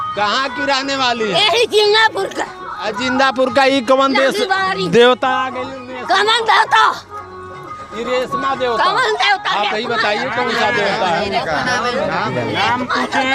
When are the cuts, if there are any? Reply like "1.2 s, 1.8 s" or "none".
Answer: none